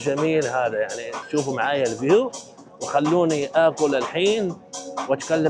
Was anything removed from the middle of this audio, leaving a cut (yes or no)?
no